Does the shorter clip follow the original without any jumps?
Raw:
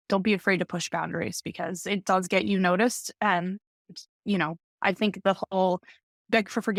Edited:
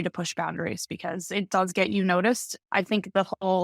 no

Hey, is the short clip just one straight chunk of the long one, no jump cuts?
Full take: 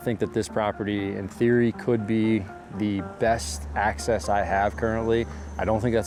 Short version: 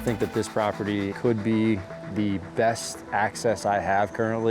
no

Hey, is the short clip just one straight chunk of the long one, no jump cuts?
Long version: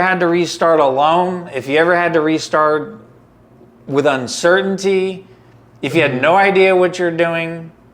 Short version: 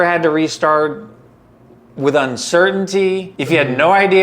no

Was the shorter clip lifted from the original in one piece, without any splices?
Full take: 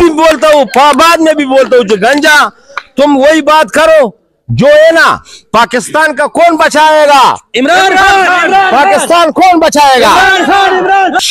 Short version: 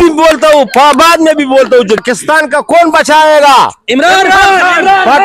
no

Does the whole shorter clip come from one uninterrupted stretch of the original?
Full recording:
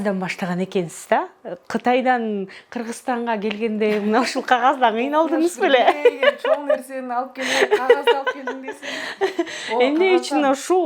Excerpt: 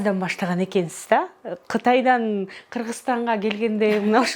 yes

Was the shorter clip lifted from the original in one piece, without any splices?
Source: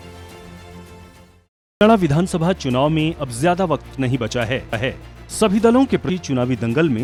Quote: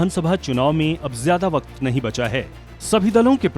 no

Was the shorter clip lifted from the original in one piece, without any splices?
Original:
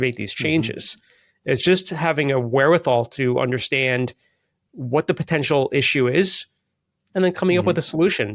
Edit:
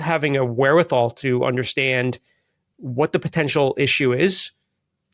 yes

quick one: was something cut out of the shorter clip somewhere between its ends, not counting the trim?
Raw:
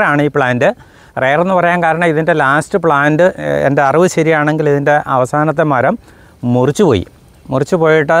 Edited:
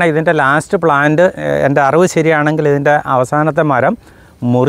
no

